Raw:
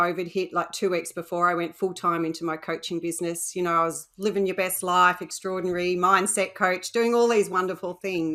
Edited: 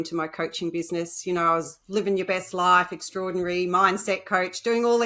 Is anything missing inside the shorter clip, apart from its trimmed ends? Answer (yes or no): no